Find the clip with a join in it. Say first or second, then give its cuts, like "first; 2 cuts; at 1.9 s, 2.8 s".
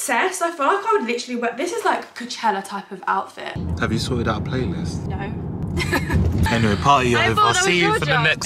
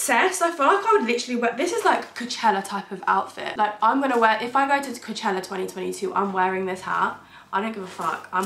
first; 1 cut; at 3.5 s